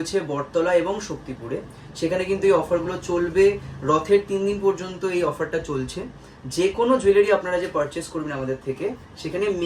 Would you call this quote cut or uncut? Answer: uncut